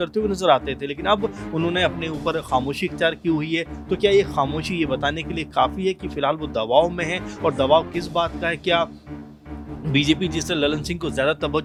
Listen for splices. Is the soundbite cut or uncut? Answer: uncut